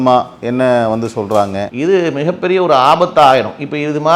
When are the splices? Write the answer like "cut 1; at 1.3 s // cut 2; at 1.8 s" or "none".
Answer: cut 1; at 1.6 s